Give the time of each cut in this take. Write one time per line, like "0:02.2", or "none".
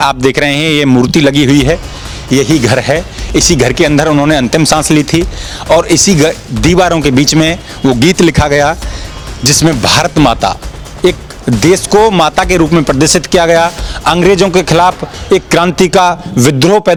none